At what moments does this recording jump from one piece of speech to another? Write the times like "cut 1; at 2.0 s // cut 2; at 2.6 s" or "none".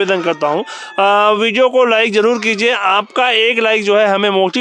none